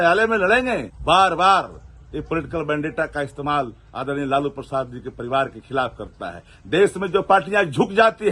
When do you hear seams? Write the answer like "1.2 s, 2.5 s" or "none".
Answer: 0.9 s